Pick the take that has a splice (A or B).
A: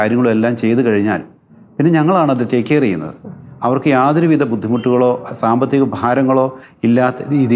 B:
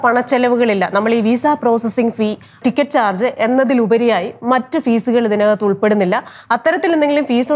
B